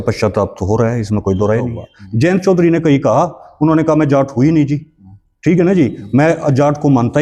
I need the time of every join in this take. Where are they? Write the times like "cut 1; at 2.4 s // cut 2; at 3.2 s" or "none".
cut 1; at 1.8 s